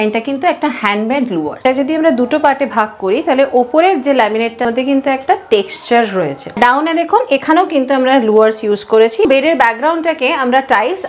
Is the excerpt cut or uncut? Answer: cut